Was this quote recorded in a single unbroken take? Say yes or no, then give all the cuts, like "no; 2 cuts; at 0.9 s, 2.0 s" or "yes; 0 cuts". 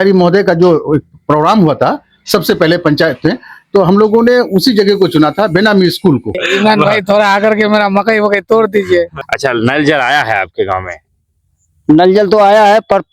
no; 2 cuts; at 6.4 s, 9.1 s